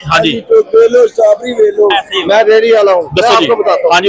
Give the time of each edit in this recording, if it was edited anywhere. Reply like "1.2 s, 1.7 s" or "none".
2.1 s